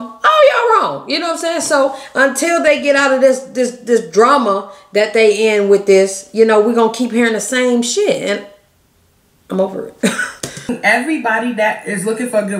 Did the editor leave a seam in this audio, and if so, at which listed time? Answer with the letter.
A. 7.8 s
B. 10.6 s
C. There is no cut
B